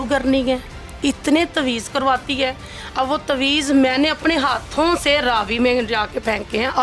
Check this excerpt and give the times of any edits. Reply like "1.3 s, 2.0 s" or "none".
none